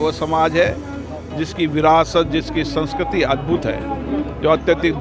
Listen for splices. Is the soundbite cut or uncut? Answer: uncut